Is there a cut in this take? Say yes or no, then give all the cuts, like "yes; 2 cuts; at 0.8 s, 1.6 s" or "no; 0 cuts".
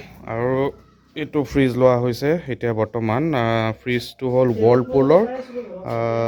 no; 0 cuts